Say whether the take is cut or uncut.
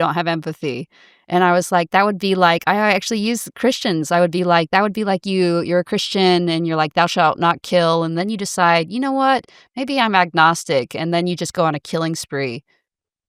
uncut